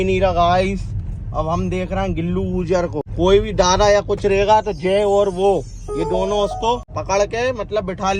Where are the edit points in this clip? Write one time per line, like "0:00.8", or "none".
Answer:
0:03.1
0:06.9